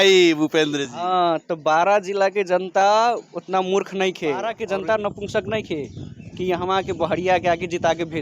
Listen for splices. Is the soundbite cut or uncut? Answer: cut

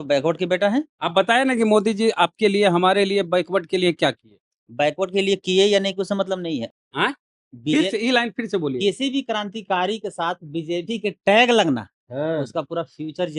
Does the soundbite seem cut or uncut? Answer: cut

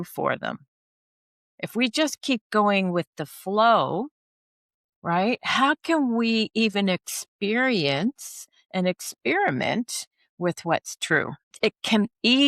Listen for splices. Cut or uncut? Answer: cut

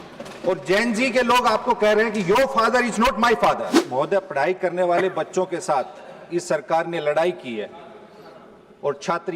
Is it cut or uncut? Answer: cut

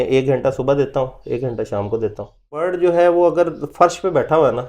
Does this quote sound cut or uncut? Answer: cut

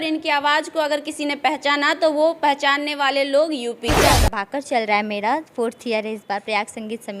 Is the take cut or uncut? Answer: cut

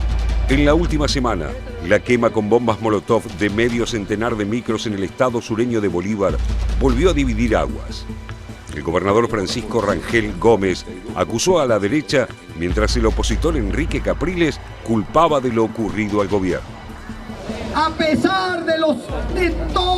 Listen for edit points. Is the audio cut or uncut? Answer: cut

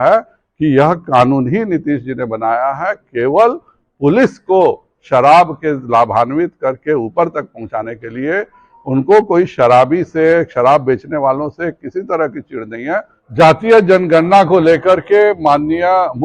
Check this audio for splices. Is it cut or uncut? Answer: cut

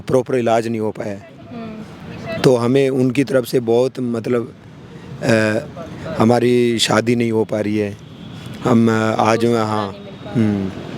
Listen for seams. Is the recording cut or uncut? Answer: uncut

